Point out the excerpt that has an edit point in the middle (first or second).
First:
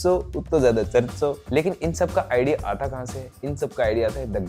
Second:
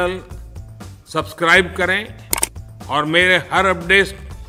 first